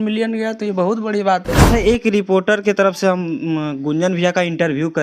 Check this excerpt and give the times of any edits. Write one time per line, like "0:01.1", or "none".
0:01.6